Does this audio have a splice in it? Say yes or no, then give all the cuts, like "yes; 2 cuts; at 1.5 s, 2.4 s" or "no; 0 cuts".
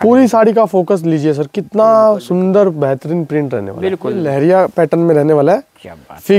yes; 1 cut; at 4.2 s